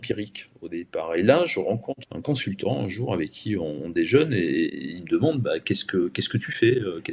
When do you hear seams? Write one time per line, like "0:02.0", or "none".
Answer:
0:02.0